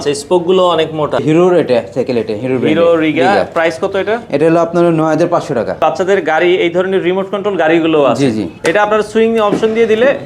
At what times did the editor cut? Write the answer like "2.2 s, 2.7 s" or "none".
1.2 s, 5.8 s, 8.5 s